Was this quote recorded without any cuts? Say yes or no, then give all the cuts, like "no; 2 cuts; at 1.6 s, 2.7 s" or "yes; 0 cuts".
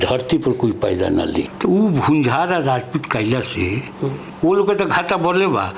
no; 2 cuts; at 1.5 s, 4.2 s